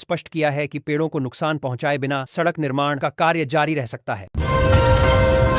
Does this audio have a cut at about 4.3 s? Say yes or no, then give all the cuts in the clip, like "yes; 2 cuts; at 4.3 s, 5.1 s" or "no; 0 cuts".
yes; 1 cut; at 4.3 s